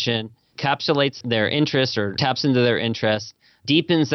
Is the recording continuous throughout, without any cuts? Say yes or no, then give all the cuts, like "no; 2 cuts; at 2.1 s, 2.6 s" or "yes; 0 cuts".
no; 2 cuts; at 1.2 s, 2.2 s